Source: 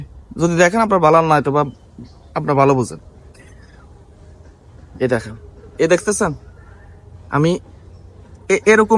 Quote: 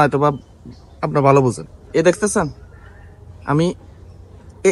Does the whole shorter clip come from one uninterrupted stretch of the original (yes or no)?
no